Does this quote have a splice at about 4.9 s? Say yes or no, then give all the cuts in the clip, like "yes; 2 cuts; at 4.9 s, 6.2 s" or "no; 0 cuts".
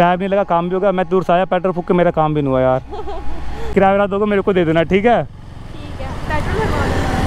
no; 1 cut; at 3.6 s